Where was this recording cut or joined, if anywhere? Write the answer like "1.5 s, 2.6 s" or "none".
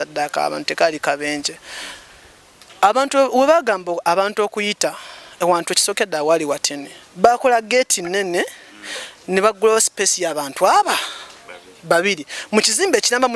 none